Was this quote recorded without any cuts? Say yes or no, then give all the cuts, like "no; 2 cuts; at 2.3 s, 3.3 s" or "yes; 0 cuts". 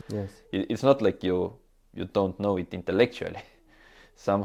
yes; 0 cuts